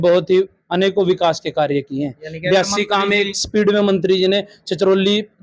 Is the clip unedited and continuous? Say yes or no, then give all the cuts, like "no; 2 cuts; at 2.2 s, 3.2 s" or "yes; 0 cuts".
yes; 0 cuts